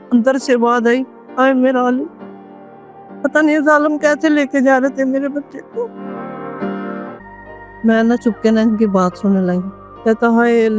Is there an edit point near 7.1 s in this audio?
yes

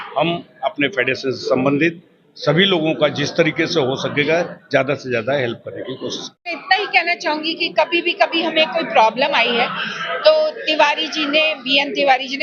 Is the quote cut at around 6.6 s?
yes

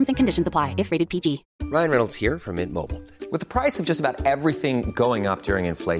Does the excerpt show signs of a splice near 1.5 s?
yes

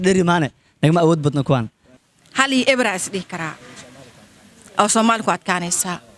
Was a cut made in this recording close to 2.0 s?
yes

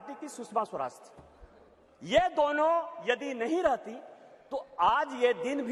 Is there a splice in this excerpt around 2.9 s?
no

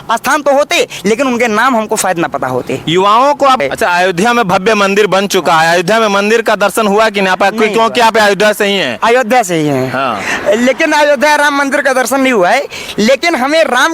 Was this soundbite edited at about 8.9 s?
no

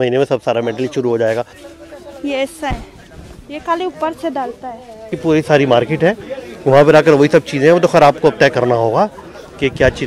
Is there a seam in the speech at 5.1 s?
yes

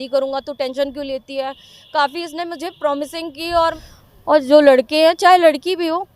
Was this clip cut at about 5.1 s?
no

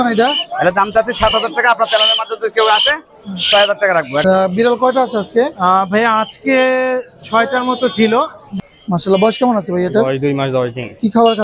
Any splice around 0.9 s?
no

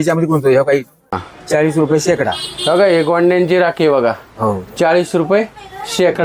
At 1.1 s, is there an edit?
yes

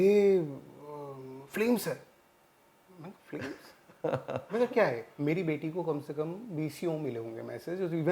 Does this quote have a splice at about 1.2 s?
no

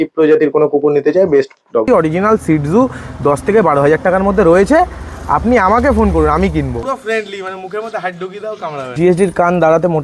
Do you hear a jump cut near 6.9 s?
yes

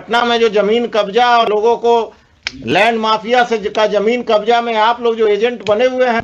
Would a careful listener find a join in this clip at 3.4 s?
no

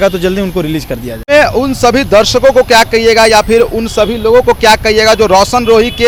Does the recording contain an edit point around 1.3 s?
no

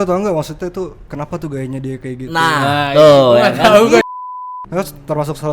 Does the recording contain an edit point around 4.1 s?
yes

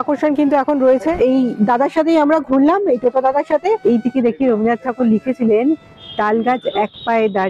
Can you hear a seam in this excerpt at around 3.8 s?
yes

